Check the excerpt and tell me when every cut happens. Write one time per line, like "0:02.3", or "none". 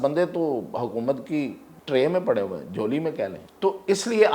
0:01.7
0:03.4